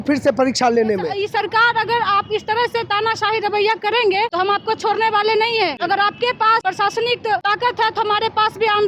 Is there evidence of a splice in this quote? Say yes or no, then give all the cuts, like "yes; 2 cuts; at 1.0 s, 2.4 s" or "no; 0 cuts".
yes; 5 cuts; at 1.2 s, 4.3 s, 5.8 s, 6.6 s, 7.4 s